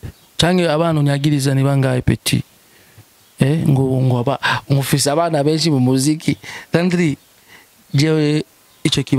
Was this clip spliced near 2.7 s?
no; 0 cuts

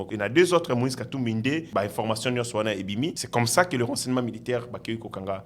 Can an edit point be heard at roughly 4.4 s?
no; 2 cuts; at 1.7 s, 3.2 s

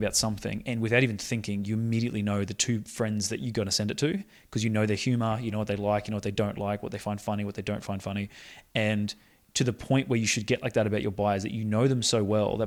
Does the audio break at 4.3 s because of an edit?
no; 0 cuts

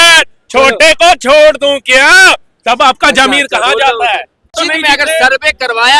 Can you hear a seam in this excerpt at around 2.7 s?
no; 1 cut; at 4.6 s

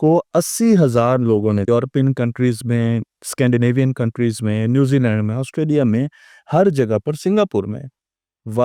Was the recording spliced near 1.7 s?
yes; 1 cut; at 1.7 s

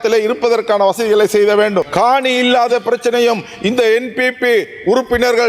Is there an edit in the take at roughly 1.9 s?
yes; 1 cut; at 1.9 s

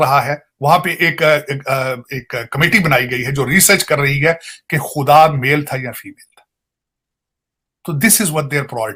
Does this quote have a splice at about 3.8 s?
no; 0 cuts

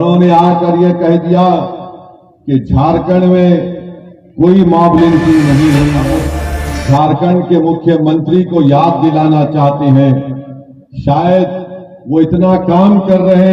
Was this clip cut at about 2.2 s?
no; 1 cut; at 6.1 s

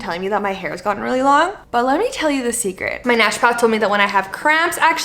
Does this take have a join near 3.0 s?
yes; 2 cuts; at 1.6 s, 3.0 s

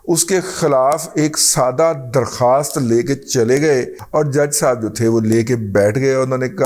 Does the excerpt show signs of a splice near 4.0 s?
yes; 1 cut; at 4.0 s

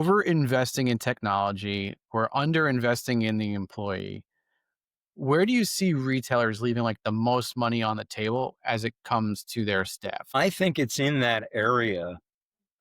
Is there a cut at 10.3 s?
yes; 1 cut; at 10.3 s

